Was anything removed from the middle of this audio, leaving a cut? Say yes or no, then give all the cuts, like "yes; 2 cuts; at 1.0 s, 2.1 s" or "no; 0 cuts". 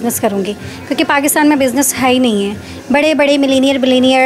no; 0 cuts